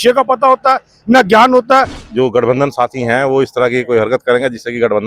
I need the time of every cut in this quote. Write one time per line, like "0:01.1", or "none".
0:02.0